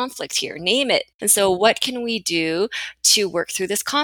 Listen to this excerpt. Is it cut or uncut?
cut